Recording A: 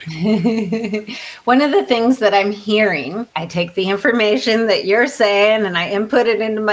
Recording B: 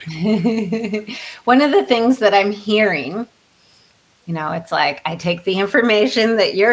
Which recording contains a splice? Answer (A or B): A